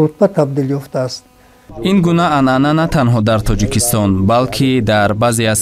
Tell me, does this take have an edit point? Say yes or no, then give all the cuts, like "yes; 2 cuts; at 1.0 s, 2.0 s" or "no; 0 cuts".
yes; 1 cut; at 1.8 s